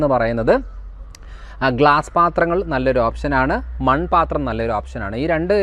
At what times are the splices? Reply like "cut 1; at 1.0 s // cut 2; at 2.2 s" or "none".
none